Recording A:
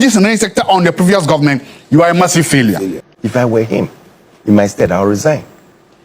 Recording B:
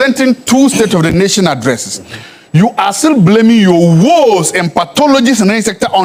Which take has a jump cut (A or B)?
A